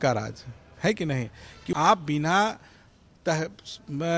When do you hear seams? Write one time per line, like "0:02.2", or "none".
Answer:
0:01.7

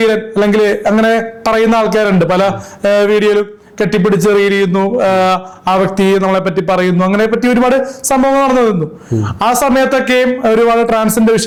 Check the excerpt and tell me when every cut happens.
none

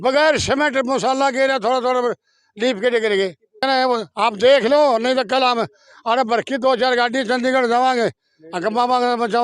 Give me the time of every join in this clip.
0:03.6

